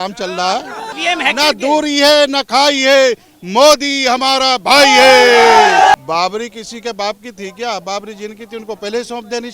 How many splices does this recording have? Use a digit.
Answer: 2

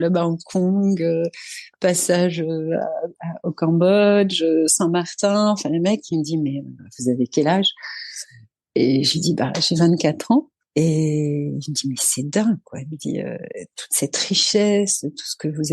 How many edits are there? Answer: 1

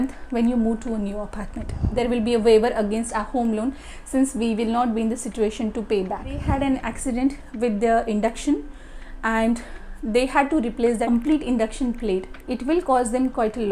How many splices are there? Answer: 3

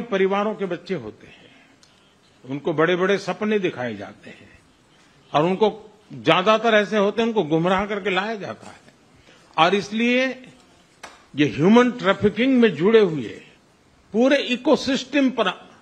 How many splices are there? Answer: 0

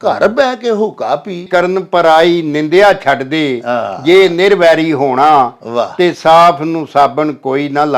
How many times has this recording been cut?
1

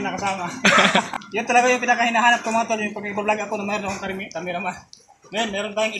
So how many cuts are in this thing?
1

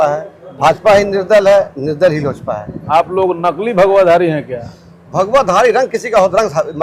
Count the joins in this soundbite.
1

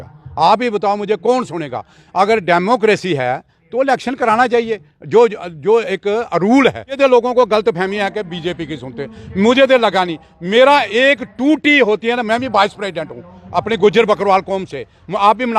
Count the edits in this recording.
1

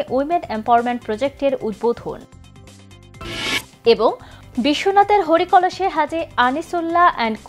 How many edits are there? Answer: 0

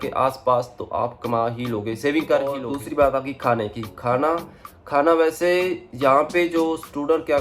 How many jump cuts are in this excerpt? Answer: 1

